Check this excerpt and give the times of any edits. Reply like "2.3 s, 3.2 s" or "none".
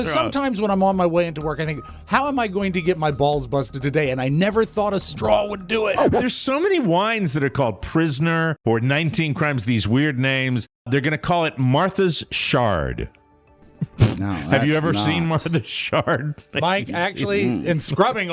6.1 s, 8.6 s, 10.9 s